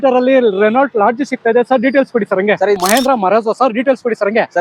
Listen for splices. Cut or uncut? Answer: cut